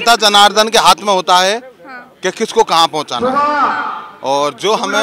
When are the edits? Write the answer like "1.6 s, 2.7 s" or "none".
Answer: none